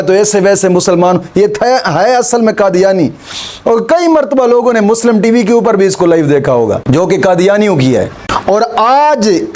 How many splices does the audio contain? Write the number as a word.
zero